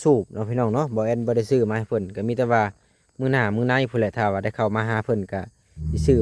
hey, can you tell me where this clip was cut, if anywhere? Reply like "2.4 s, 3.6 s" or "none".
none